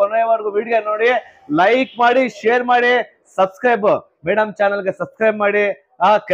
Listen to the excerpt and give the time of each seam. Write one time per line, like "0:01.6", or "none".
none